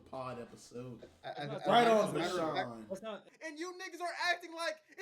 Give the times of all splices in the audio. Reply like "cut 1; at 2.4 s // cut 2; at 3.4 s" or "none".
cut 1; at 3.3 s